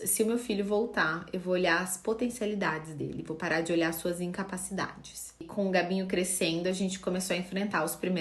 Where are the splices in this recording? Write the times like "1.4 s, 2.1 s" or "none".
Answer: 5.5 s